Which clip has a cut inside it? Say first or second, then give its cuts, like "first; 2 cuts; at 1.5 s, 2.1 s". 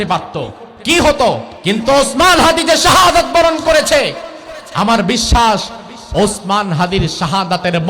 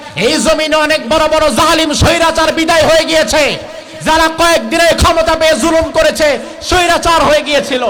first; 1 cut; at 1.5 s